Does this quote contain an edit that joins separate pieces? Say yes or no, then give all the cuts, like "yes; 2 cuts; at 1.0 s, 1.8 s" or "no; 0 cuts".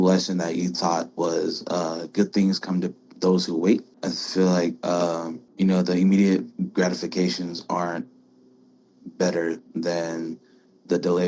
yes; 2 cuts; at 3.9 s, 5.4 s